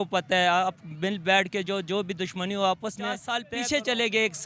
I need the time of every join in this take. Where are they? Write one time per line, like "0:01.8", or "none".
0:03.3